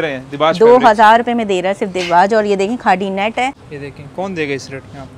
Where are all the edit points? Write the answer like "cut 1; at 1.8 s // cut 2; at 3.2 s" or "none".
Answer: cut 1; at 3.7 s